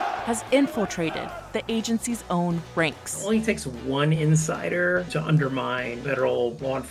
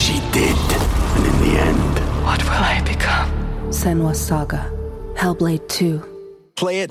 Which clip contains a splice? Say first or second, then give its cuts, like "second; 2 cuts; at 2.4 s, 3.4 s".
first; 1 cut; at 5.1 s